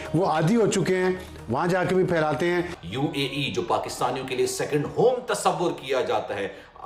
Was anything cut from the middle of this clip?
no; 0 cuts

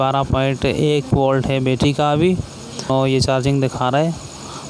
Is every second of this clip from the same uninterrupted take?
no; 1 cut; at 2.9 s

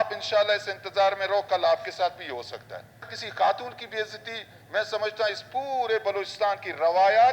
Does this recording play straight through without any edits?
no; 1 cut; at 3.2 s

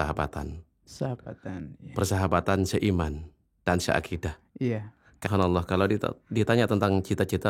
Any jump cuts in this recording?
yes; 1 cut; at 5.1 s

